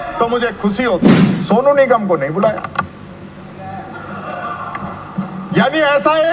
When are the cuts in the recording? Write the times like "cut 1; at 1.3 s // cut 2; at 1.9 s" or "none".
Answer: cut 1; at 1.3 s